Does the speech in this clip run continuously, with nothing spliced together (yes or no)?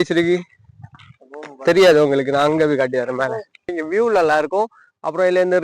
no